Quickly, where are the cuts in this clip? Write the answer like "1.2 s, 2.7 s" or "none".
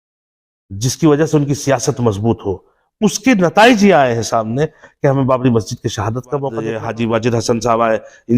6.7 s